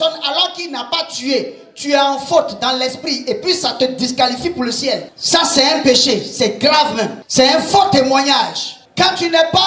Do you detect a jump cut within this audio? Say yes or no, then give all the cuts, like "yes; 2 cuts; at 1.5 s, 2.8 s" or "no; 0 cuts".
no; 0 cuts